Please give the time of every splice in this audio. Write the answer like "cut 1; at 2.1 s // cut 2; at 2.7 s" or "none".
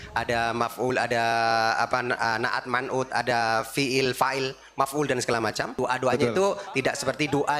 cut 1; at 5.7 s // cut 2; at 6.7 s